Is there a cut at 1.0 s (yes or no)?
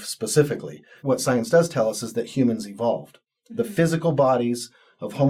yes